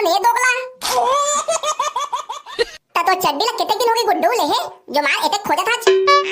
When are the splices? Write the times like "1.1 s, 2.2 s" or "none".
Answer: 2.5 s